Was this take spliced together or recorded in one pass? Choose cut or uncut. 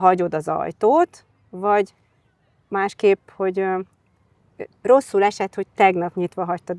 uncut